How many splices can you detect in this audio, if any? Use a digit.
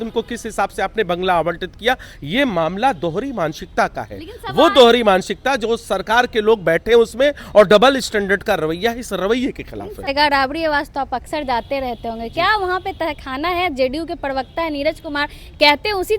1